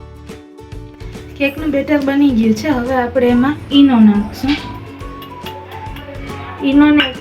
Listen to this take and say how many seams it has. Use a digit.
1